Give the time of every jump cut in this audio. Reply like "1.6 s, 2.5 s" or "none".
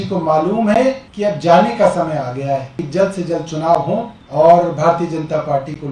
1.1 s, 2.8 s, 4.2 s